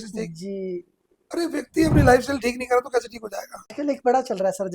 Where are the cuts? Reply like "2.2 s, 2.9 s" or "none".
3.7 s